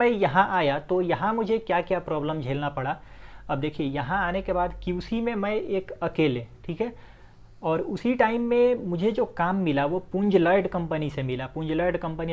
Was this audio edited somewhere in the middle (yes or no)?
no